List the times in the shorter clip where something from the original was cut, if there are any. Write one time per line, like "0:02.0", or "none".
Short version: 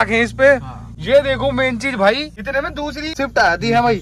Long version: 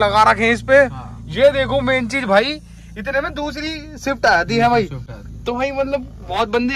0:02.7